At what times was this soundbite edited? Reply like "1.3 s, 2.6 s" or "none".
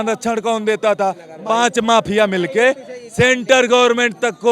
1.3 s